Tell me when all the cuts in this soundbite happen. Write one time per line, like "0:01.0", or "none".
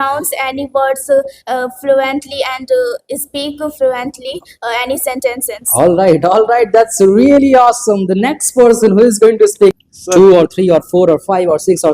0:09.8